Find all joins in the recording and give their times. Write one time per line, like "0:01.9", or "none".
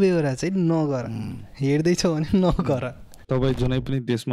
0:03.2